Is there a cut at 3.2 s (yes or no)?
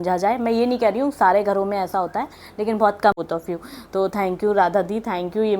yes